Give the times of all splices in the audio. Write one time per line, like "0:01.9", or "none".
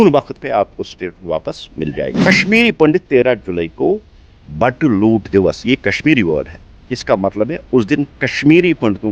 0:02.3